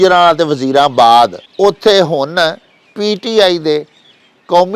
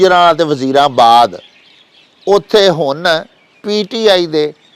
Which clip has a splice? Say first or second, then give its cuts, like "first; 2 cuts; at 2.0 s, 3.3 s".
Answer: first; 1 cut; at 1.4 s